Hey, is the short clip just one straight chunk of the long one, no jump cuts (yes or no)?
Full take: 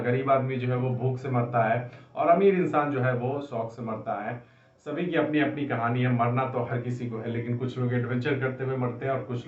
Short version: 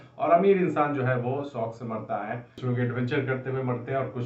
no